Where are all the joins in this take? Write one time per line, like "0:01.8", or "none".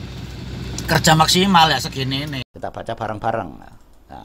0:02.5